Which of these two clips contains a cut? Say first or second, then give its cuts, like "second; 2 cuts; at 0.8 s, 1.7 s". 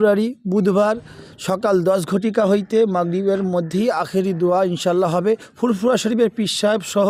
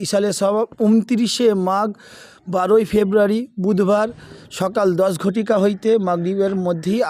first; 1 cut; at 5.5 s